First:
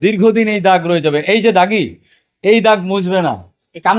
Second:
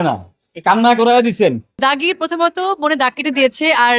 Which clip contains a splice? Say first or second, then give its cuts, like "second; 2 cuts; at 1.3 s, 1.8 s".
second; 1 cut; at 1.8 s